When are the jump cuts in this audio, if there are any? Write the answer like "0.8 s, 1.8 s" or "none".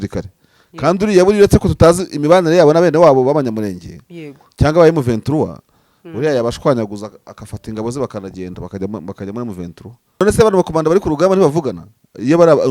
10.2 s